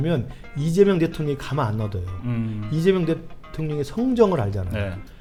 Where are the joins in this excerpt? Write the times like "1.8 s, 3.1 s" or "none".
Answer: none